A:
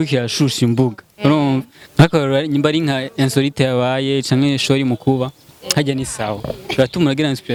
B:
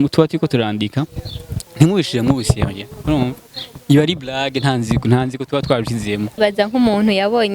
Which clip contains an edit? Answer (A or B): B